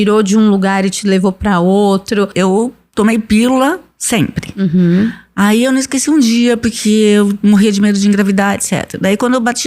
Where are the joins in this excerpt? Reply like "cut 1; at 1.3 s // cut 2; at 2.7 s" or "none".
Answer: cut 1; at 2.3 s